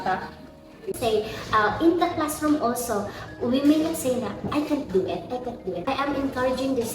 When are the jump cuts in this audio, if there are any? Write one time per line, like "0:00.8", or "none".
0:00.9
0:05.8